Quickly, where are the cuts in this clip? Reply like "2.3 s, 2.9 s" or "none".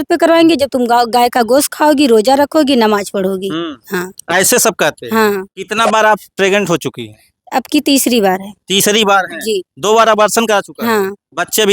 5.6 s